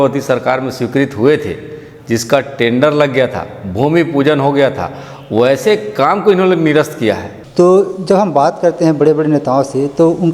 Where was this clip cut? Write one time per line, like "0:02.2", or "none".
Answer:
0:07.4